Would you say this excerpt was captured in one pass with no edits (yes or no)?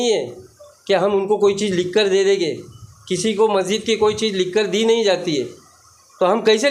yes